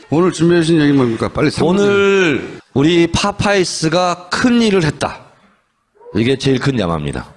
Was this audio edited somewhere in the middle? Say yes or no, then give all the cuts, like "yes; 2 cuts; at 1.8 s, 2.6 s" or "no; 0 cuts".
yes; 1 cut; at 5.3 s